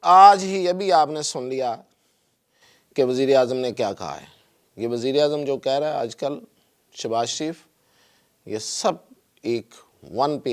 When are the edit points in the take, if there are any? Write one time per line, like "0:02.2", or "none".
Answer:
none

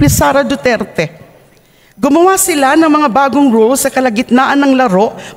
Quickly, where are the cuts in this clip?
none

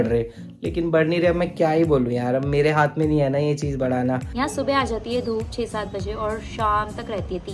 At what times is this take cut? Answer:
0:04.3

